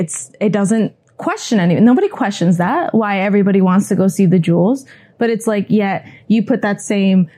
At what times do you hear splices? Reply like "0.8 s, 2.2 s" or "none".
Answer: none